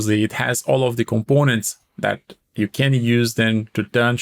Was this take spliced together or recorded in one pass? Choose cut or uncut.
uncut